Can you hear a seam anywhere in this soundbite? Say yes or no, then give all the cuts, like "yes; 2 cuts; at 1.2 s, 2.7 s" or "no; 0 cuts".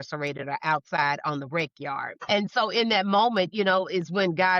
yes; 1 cut; at 2.2 s